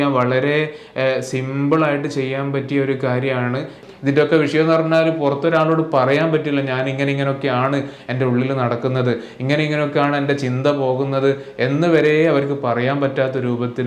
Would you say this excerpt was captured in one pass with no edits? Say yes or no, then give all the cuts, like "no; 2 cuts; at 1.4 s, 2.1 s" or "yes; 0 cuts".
no; 1 cut; at 3.8 s